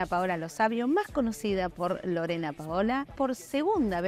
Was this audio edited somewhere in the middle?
yes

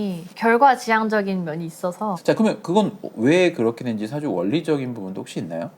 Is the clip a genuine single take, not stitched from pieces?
yes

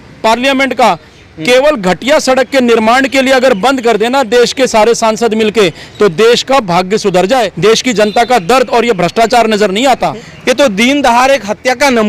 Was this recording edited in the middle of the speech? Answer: yes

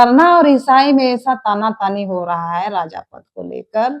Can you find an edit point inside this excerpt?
no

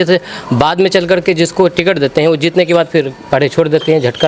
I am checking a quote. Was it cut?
no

